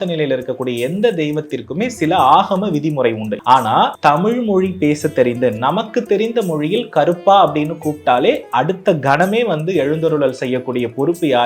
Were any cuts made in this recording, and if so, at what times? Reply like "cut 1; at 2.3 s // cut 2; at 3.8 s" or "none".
cut 1; at 3.3 s // cut 2; at 3.9 s